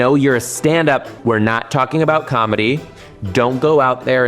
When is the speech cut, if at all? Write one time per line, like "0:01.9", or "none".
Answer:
0:01.1

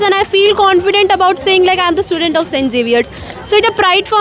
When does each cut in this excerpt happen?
none

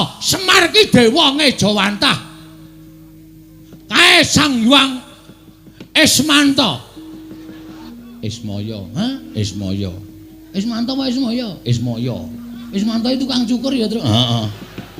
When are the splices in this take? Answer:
0:07.9
0:12.6

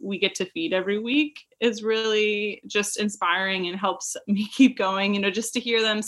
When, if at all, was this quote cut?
none

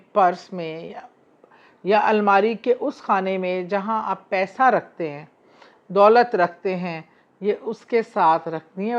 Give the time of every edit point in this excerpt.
none

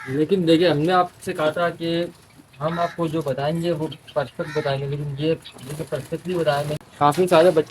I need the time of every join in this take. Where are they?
0:06.8

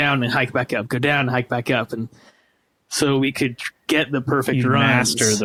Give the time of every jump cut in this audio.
none

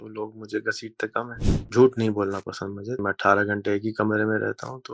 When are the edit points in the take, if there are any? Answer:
0:01.7
0:03.0

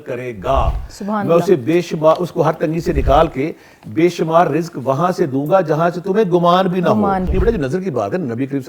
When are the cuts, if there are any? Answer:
0:07.3

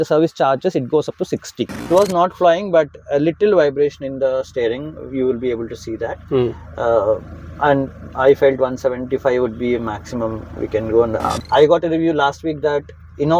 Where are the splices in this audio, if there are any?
0:01.9
0:11.3

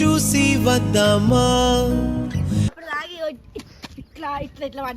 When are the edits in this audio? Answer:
0:02.7

